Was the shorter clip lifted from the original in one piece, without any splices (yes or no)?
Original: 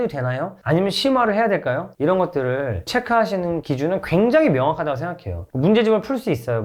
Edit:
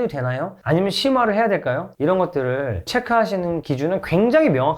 yes